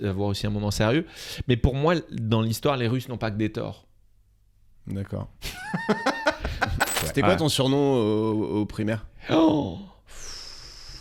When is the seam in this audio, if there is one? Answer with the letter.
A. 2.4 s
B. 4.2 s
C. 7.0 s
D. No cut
C